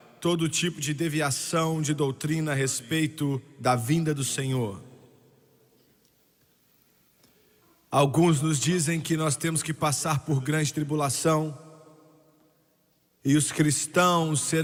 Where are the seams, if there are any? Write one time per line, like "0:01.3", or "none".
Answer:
none